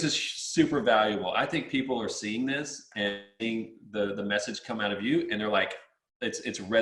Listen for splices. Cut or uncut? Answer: uncut